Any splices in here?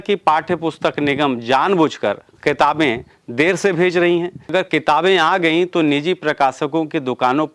yes; 1 cut; at 4.5 s

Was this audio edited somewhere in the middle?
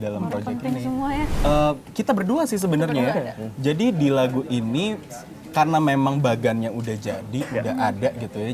yes; 1 cut; at 1.3 s

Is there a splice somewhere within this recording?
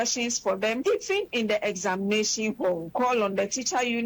yes; 2 cuts; at 0.8 s, 2.9 s

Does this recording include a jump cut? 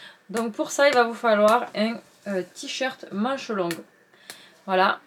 no; 0 cuts

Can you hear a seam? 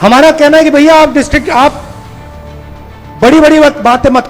no; 0 cuts

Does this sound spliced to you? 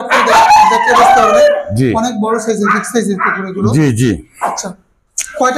no; 0 cuts

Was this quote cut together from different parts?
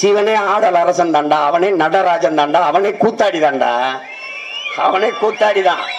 no; 0 cuts

